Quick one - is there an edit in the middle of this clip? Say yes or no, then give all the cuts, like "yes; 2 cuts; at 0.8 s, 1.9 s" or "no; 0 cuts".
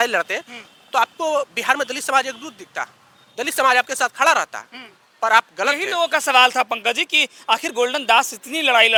no; 0 cuts